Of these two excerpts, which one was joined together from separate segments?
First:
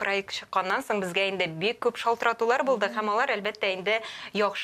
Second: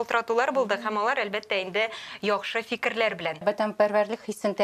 second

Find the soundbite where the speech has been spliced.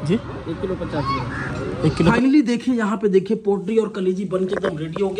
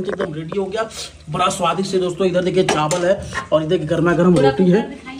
first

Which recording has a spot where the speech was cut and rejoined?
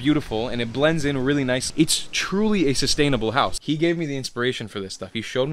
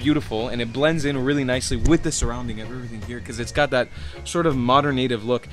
first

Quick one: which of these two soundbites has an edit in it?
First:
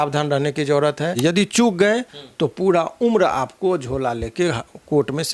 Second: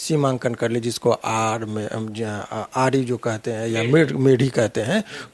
first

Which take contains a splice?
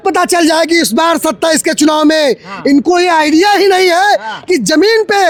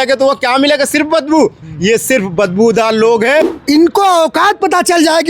second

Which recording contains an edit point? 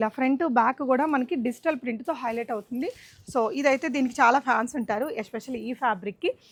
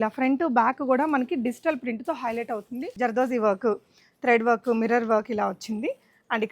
second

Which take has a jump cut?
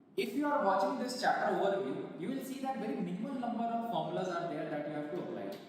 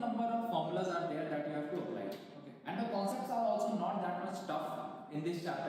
first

